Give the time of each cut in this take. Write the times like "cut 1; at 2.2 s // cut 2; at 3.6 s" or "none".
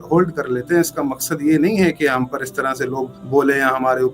cut 1; at 3.2 s